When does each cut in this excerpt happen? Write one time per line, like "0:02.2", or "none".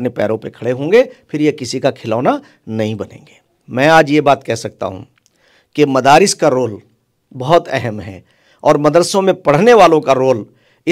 none